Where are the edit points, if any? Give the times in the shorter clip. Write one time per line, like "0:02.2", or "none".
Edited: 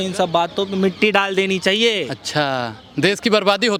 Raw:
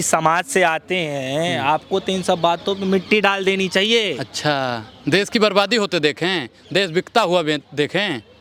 none